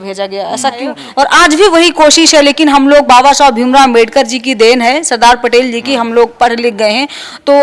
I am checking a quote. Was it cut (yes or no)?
yes